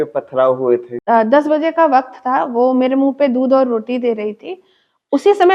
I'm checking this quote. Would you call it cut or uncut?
cut